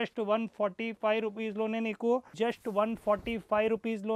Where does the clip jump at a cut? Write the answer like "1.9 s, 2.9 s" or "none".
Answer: 2.3 s